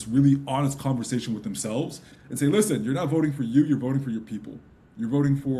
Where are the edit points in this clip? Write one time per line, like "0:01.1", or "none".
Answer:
none